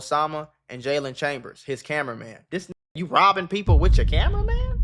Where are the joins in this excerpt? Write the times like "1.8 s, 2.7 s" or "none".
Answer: none